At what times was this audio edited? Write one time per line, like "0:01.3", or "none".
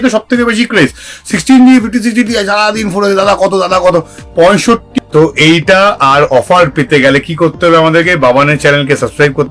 0:05.0